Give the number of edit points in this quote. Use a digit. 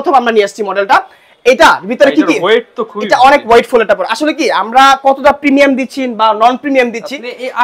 0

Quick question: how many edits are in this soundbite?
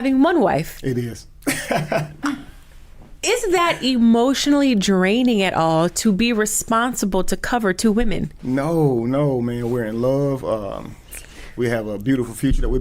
1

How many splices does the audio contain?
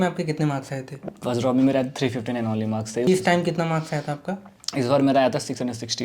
1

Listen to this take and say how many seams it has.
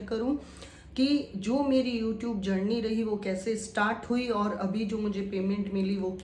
0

